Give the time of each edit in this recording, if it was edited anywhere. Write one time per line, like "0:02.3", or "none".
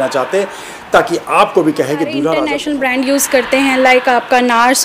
0:02.5